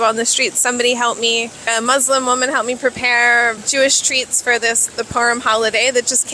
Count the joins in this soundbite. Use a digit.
2